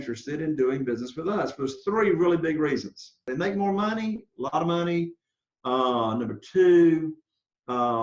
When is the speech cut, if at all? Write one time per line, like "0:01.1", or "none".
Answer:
0:03.2